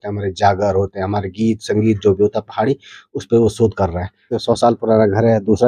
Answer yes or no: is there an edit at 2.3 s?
no